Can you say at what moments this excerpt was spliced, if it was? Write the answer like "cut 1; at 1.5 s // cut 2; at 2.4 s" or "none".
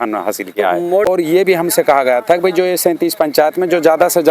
cut 1; at 1.1 s